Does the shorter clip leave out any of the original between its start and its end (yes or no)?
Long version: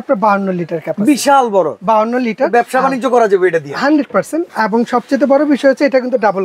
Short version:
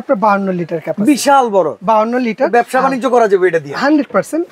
no